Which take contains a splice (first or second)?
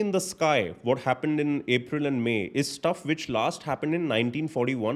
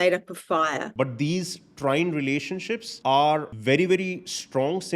second